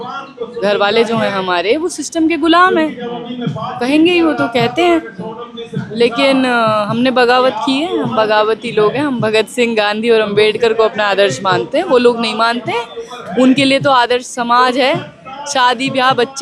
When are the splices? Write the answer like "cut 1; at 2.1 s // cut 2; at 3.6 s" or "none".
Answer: none